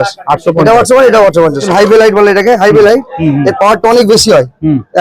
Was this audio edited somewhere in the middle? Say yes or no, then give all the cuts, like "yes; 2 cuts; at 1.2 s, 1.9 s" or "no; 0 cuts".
yes; 1 cut; at 1.6 s